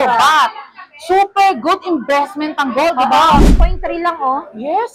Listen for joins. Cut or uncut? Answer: cut